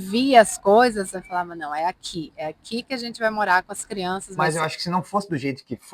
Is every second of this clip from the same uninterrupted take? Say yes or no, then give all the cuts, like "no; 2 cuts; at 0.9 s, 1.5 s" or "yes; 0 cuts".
no; 1 cut; at 4.3 s